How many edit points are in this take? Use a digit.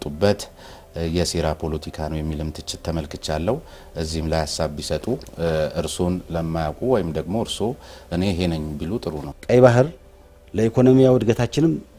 1